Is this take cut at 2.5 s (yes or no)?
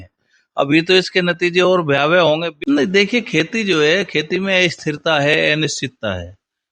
yes